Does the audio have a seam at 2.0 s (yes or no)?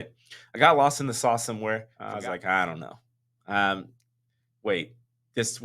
yes